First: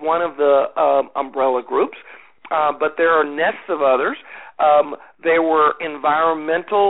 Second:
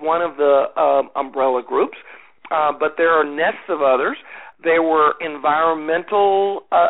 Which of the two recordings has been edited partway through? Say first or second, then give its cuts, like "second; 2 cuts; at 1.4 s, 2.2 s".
second; 1 cut; at 4.4 s